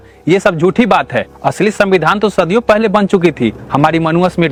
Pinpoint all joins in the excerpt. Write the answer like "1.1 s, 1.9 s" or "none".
none